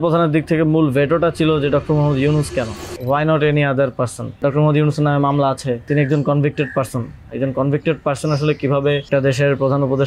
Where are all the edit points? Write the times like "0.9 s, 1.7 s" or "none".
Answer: 2.9 s, 4.4 s, 5.9 s, 9.1 s